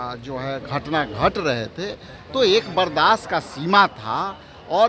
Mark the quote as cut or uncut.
uncut